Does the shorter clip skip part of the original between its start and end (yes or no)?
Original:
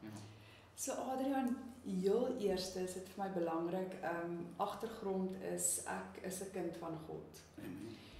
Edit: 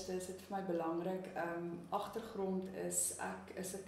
no